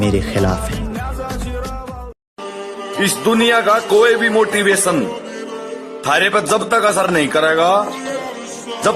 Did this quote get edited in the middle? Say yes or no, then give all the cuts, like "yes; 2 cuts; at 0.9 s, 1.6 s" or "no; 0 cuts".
yes; 1 cut; at 2.2 s